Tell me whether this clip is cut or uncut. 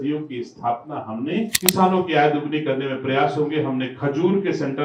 cut